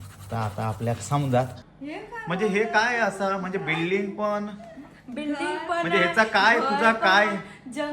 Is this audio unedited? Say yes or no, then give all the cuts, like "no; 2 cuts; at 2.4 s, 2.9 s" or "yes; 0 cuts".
no; 1 cut; at 1.6 s